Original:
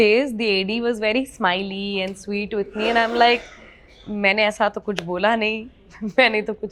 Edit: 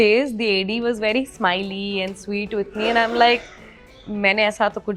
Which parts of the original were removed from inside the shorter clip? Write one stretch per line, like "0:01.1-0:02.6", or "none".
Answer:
none